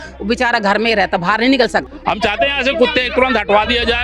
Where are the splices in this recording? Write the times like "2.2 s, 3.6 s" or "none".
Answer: 1.9 s